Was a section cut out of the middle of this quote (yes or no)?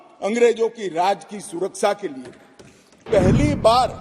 yes